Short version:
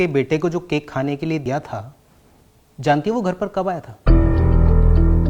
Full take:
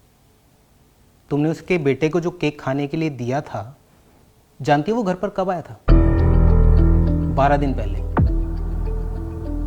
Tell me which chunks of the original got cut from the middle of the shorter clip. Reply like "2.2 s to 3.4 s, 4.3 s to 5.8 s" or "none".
3.1 s to 3.3 s